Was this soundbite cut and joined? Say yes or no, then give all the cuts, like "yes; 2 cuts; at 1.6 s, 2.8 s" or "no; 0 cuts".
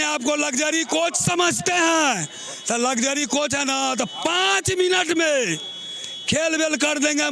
no; 0 cuts